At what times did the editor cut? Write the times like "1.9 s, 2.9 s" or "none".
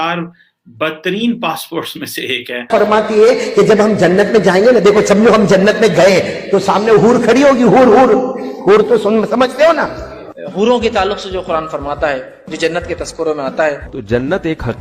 2.7 s